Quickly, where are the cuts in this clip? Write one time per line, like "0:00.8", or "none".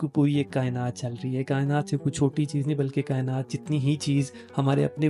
none

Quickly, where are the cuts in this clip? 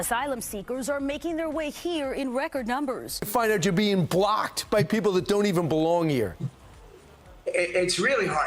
0:03.2

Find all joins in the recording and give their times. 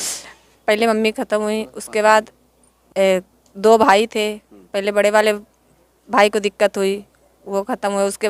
none

